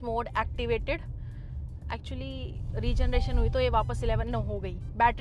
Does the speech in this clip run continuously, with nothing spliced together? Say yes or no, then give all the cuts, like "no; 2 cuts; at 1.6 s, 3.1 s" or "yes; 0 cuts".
yes; 0 cuts